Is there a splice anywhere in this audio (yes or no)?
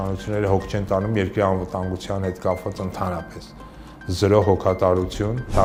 no